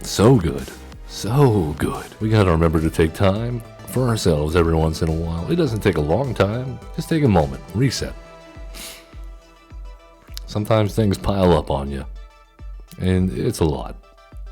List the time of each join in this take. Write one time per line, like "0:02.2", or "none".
0:02.1